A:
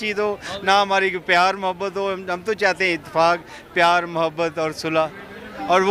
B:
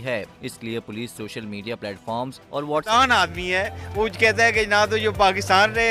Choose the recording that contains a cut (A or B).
B